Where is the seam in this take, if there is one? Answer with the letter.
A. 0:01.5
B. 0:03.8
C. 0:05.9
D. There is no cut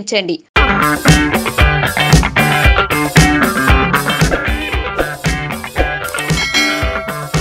D